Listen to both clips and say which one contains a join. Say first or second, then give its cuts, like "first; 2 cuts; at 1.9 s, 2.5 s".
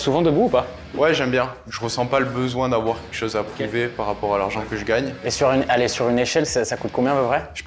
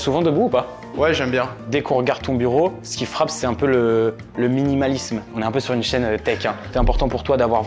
first; 2 cuts; at 1.6 s, 5.2 s